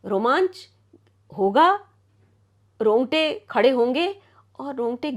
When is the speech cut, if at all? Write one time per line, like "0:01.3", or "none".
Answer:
none